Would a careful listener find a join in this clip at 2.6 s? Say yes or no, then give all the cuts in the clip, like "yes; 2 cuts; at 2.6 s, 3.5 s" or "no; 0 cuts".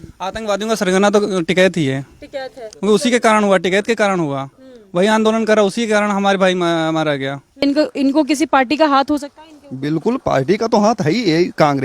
yes; 2 cuts; at 2.6 s, 7.6 s